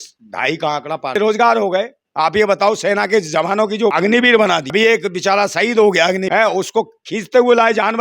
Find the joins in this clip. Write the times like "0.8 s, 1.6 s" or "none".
1.2 s, 3.9 s, 4.7 s, 6.2 s